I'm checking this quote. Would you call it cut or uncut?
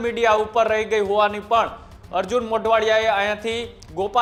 uncut